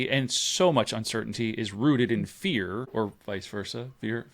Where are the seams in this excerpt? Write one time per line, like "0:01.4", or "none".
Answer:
0:02.9